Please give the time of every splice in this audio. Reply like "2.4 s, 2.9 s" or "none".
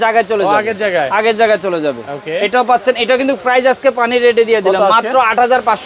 none